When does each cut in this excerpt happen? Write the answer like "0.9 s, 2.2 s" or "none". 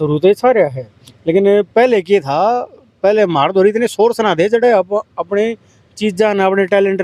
none